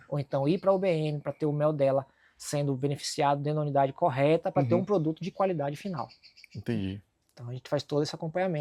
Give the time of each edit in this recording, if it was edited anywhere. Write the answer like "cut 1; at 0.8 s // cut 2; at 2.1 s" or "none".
none